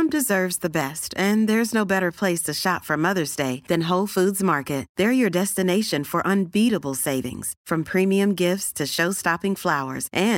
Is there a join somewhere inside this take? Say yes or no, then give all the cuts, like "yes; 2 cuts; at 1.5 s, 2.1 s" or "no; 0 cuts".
no; 0 cuts